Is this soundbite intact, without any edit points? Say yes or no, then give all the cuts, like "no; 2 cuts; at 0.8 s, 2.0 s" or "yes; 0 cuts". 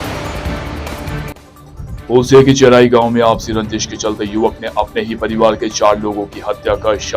no; 1 cut; at 1.0 s